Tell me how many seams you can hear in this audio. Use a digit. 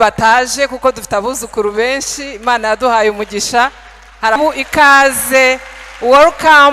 1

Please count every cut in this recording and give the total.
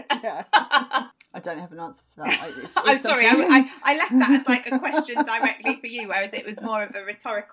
1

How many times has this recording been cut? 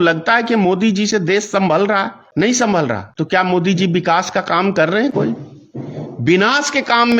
2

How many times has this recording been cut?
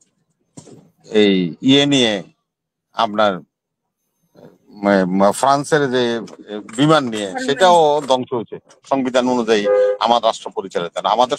1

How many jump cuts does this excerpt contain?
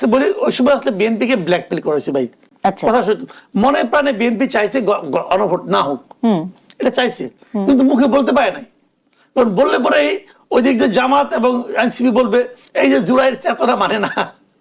0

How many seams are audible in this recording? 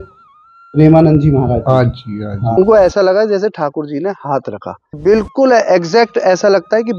2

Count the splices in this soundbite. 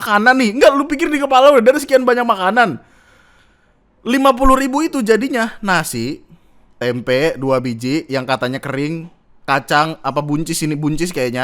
1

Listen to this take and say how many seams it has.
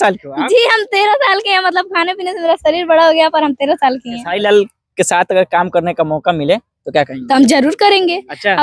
1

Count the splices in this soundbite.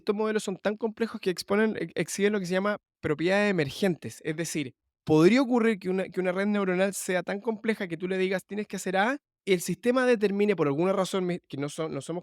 2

